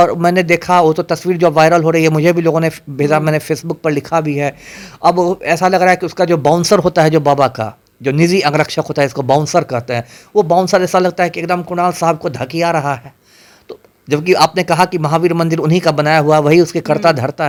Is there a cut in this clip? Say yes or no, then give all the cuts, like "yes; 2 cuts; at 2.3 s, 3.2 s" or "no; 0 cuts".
no; 0 cuts